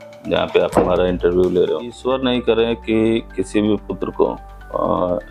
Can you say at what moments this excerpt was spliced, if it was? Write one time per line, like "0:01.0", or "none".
0:02.0